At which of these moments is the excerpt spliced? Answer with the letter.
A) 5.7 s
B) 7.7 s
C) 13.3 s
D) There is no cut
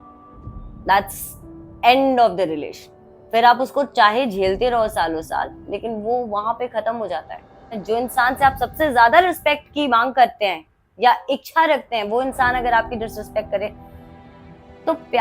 B